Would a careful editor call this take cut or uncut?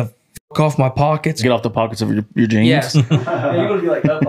cut